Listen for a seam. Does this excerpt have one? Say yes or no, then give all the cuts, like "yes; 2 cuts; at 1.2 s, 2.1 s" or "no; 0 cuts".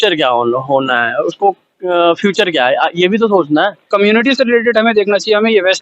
yes; 1 cut; at 3.9 s